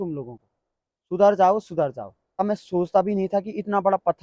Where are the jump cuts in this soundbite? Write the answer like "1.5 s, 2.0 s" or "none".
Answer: 2.4 s